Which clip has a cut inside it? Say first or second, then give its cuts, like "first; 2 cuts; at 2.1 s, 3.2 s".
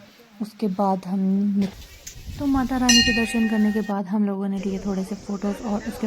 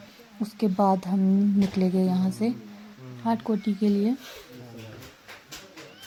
first; 1 cut; at 1.7 s